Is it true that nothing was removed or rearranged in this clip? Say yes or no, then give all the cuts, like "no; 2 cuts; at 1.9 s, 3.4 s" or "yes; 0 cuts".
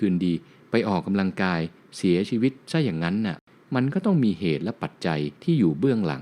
no; 3 cuts; at 1.8 s, 3.5 s, 5.3 s